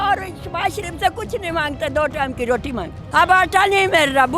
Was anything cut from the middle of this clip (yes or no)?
yes